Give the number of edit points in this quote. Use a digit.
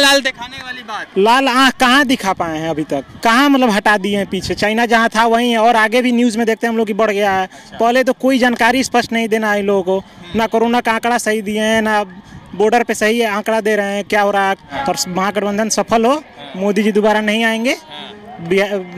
1